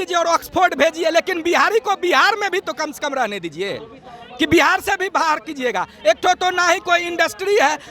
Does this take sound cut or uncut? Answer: uncut